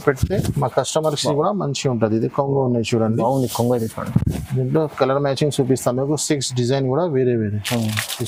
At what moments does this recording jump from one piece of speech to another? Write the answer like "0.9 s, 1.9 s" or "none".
none